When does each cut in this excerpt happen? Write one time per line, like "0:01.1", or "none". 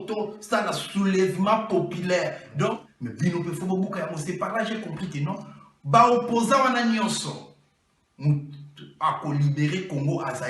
0:02.9